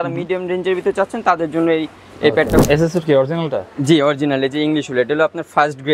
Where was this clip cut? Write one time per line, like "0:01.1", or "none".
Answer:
0:02.6